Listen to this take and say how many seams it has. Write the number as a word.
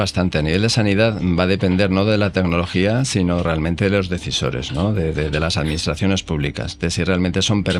zero